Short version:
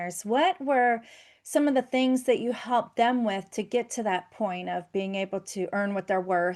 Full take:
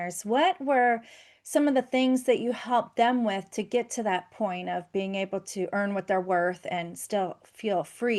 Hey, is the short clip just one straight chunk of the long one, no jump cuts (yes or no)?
yes